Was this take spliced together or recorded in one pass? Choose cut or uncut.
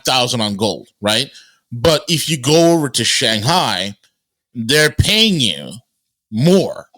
uncut